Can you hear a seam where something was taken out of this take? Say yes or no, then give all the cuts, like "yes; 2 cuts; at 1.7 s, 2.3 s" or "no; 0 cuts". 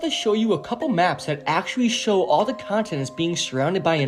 no; 0 cuts